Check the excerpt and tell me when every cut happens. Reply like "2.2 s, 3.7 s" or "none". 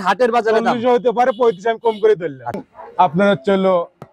2.4 s